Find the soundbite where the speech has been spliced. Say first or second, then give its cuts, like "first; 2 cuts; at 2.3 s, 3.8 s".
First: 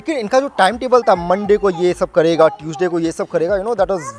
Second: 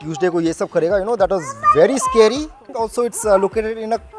second; 1 cut; at 2.7 s